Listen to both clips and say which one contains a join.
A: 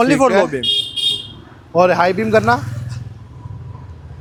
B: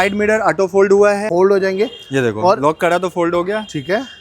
B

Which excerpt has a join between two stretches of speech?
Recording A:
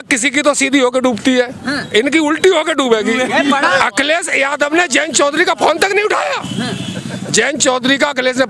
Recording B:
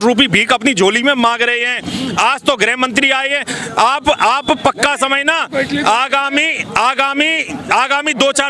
A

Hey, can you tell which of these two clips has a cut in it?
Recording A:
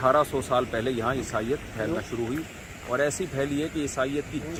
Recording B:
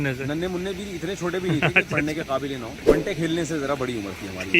B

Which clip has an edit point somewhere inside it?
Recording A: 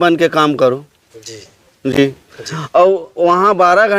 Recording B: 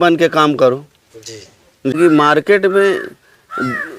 B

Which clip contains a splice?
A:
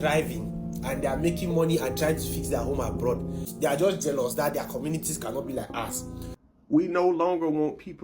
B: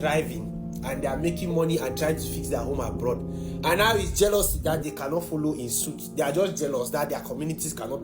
A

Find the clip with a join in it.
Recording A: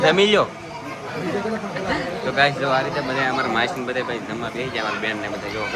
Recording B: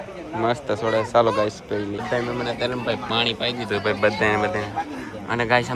B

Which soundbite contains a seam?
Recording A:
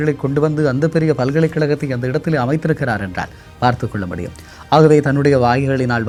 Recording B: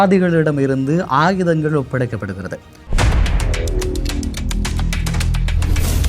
B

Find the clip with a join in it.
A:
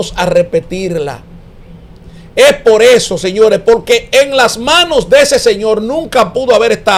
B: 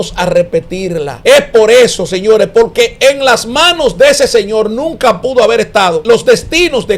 B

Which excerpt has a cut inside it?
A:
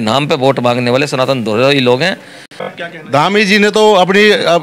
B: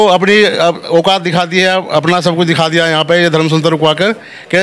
A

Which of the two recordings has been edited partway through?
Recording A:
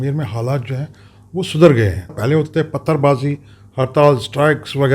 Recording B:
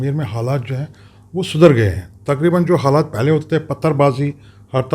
A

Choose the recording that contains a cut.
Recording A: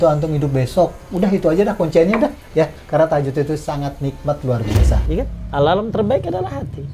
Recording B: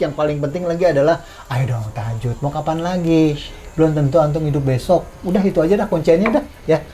A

